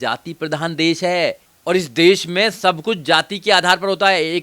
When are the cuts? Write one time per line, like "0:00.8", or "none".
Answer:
0:01.5